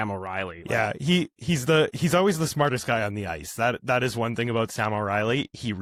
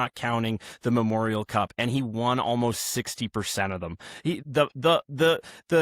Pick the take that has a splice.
second; 1 cut; at 4.5 s

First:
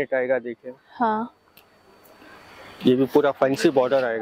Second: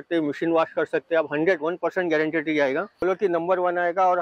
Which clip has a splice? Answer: second; 1 cut; at 3.0 s

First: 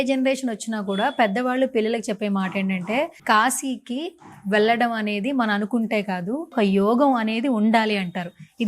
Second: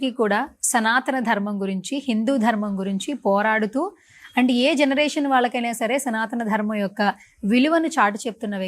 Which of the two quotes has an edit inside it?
first; 2 cuts; at 3.2 s, 6.5 s

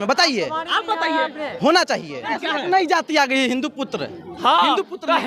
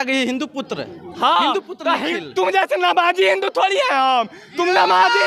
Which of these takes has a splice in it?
first; 1 cut; at 2.3 s

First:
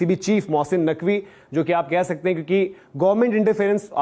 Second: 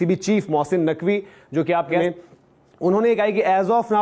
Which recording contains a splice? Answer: second; 1 cut; at 2.0 s

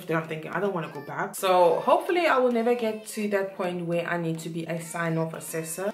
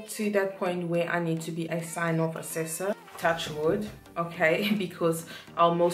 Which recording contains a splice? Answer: first; 1 cut; at 1.3 s

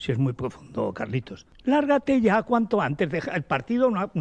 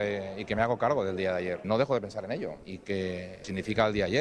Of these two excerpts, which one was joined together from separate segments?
second; 3 cuts; at 1.6 s, 2.7 s, 3.4 s

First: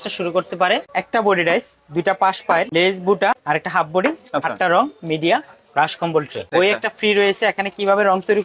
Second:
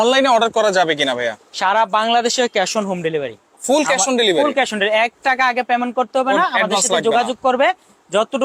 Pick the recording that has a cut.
first; 4 cuts; at 1.0 s, 2.7 s, 3.4 s, 6.5 s

